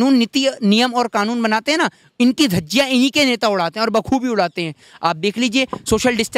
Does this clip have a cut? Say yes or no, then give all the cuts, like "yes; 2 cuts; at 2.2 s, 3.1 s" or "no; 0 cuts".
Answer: no; 0 cuts